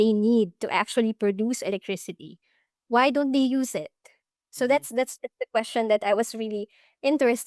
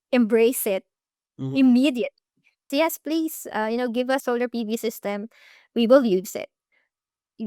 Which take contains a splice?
second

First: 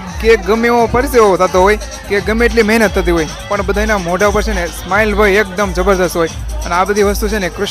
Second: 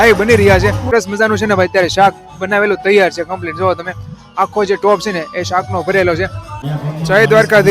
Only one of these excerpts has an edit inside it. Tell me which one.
second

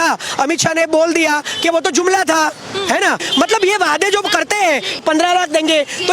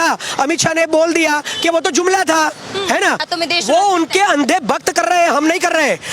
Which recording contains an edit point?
second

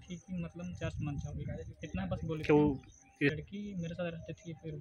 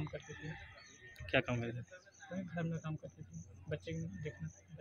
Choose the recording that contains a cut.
first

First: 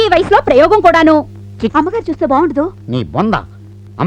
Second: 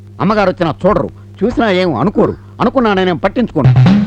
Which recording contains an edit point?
first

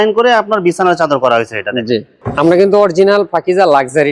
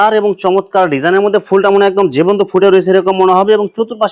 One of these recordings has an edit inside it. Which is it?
first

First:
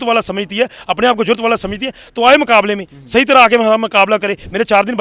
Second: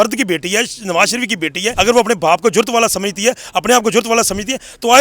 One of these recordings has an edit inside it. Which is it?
second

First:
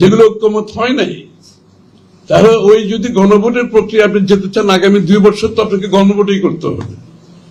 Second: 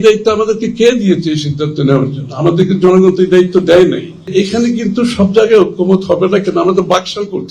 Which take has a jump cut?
second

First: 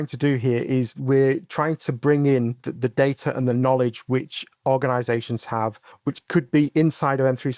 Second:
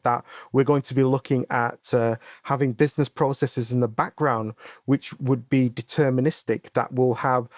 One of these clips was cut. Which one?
first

